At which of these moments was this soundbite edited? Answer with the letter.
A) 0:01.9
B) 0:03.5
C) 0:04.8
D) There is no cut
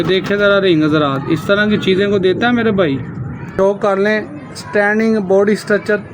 B